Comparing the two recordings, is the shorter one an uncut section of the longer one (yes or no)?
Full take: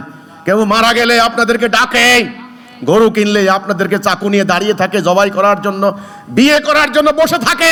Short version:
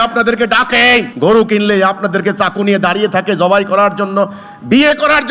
no